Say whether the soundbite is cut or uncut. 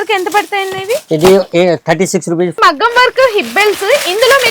cut